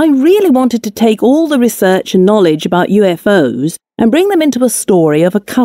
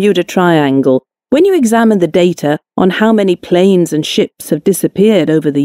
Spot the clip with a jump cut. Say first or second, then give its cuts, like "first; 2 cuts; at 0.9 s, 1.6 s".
second; 2 cuts; at 1.6 s, 4.3 s